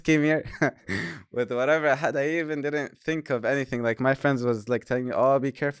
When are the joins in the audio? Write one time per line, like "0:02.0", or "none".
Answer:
none

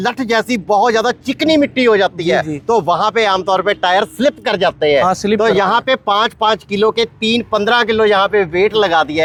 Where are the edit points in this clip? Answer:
none

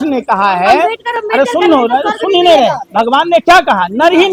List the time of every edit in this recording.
none

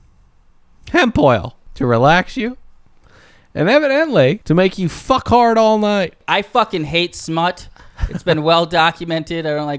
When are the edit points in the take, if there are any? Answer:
0:01.6
0:04.4
0:06.2

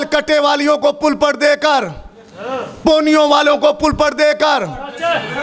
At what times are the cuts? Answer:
none

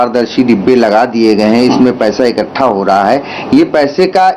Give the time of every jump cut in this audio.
none

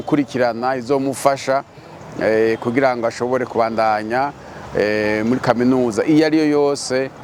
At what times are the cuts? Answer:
none

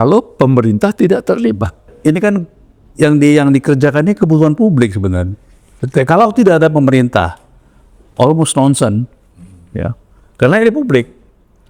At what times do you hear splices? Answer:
0:01.9

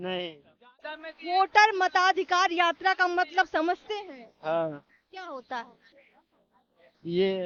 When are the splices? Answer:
none

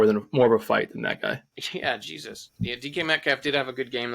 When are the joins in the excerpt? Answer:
0:01.5

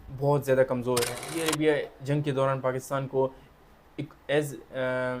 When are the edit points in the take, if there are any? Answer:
0:01.4

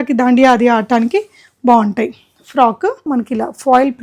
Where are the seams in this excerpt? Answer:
0:03.0

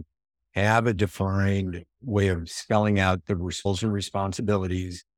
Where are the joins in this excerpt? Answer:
0:03.6

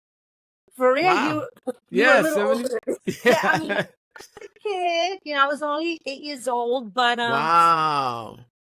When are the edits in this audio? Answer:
0:03.1

